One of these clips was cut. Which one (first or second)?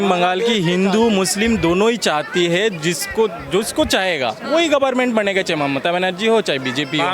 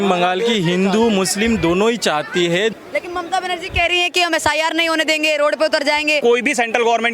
second